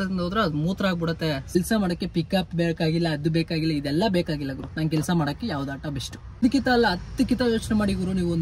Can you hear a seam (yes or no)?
yes